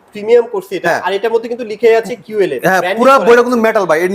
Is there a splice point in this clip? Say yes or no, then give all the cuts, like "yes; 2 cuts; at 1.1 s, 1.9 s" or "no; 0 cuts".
no; 0 cuts